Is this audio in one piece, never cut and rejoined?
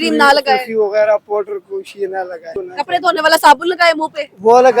no; 1 cut; at 2.6 s

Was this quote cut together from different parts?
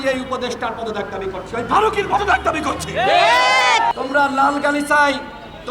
yes; 1 cut; at 3.9 s

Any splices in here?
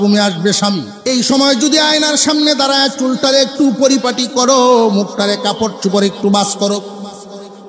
yes; 1 cut; at 0.9 s

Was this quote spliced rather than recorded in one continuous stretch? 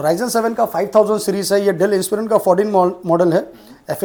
no; 0 cuts

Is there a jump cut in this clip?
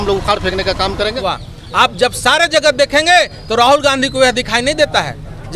yes; 1 cut; at 1.2 s

